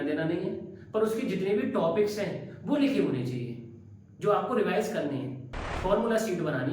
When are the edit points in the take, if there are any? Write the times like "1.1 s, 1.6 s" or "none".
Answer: 5.7 s